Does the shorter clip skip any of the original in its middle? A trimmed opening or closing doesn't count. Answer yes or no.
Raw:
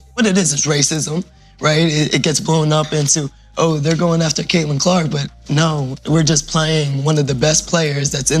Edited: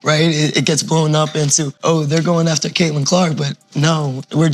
yes